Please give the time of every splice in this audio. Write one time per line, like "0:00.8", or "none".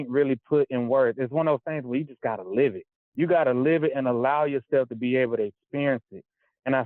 0:03.1